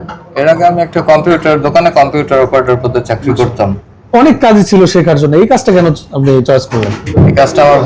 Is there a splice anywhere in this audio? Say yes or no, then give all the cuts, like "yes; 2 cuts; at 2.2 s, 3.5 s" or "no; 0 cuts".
yes; 2 cuts; at 3.8 s, 7.0 s